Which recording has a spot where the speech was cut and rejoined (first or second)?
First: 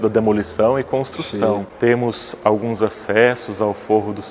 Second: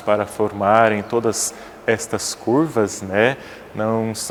first